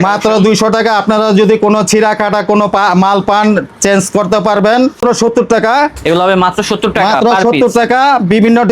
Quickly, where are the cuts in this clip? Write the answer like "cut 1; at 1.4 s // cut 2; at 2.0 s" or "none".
cut 1; at 5.0 s